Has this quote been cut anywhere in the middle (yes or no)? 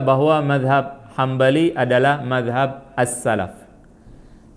no